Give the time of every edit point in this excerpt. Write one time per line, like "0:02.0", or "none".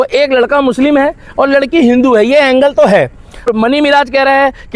0:03.5